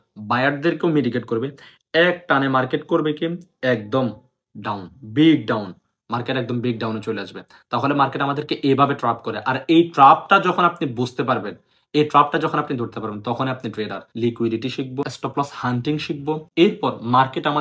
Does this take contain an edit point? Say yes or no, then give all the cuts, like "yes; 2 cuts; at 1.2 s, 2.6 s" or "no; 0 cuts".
yes; 2 cuts; at 14.0 s, 15.1 s